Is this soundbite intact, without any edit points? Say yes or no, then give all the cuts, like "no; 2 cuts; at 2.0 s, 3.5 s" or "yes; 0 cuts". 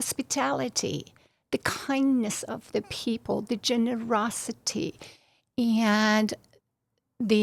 yes; 0 cuts